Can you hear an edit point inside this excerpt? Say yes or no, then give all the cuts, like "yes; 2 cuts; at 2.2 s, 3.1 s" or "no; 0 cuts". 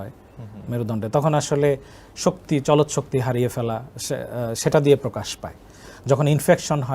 no; 0 cuts